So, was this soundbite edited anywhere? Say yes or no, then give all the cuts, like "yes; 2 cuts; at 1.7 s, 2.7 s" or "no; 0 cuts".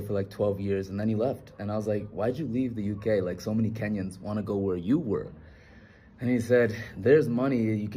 no; 0 cuts